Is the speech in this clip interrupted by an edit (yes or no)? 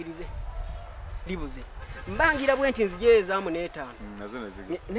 no